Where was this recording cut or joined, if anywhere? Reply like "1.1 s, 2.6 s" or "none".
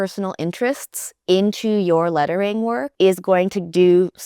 2.9 s